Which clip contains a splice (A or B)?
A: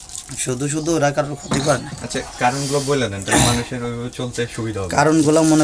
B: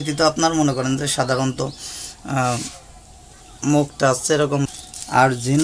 B